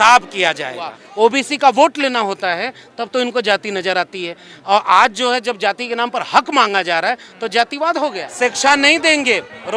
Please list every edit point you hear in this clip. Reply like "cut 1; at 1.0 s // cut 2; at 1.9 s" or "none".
cut 1; at 1.0 s // cut 2; at 8.2 s